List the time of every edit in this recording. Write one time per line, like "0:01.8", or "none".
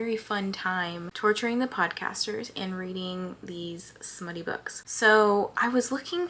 none